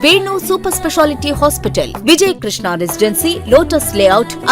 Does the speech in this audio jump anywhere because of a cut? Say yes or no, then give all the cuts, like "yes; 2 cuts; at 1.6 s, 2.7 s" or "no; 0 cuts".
no; 0 cuts